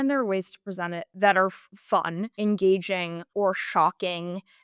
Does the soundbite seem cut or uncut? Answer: cut